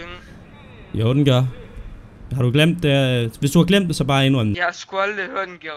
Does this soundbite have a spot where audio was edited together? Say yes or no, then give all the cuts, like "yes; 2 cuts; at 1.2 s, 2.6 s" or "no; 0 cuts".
yes; 1 cut; at 4.6 s